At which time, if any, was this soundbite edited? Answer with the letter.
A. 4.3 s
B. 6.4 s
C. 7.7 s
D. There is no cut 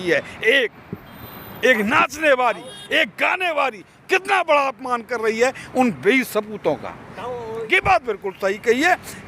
C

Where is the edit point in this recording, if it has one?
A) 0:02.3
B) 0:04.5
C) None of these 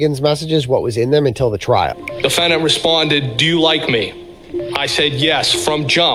C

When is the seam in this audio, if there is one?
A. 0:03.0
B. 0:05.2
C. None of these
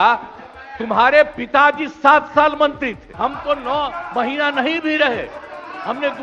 A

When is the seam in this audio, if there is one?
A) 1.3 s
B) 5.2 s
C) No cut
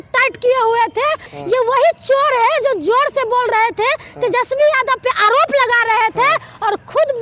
A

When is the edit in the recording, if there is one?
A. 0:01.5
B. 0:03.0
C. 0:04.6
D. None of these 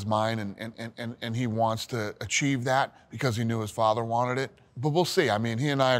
C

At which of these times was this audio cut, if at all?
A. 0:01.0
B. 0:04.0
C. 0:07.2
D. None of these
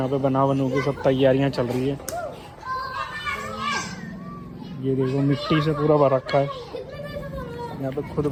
D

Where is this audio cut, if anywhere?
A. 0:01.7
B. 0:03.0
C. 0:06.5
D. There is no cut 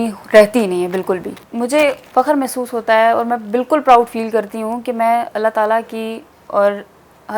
A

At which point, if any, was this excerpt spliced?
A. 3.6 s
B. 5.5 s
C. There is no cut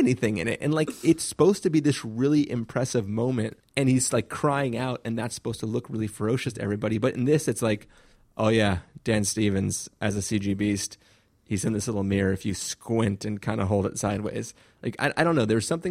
A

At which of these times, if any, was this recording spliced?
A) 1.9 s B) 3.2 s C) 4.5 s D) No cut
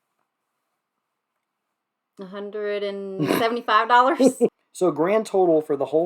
C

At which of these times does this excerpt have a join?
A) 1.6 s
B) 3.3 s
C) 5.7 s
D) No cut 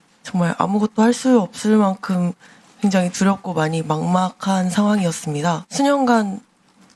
C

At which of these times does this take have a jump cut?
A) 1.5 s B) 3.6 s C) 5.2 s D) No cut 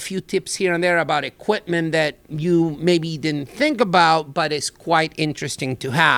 D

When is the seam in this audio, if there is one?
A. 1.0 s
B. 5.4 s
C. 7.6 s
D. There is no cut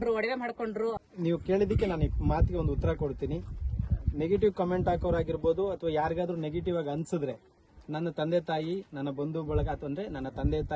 A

